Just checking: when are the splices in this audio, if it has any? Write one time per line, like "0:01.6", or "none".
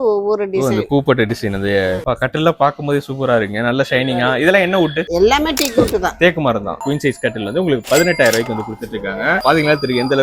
0:02.0
0:06.8
0:09.4